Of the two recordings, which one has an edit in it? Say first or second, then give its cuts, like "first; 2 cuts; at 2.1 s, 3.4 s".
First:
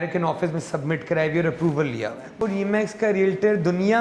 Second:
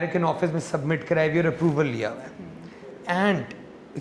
first; 1 cut; at 2.4 s